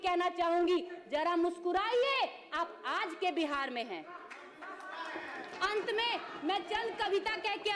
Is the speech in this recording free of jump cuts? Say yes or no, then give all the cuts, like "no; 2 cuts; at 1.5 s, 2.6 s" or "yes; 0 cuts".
yes; 0 cuts